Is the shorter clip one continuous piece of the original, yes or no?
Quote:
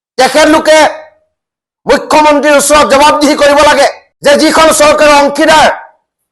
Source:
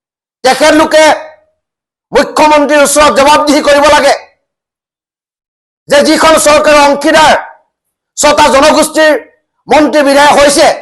no